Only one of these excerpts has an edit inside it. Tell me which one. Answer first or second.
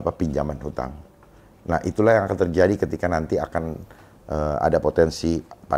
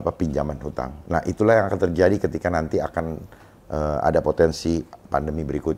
second